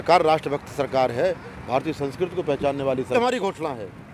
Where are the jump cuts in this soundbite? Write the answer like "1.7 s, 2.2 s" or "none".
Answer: 3.2 s